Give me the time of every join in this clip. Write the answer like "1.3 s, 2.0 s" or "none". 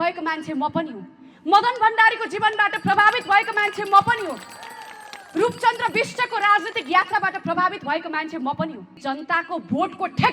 8.9 s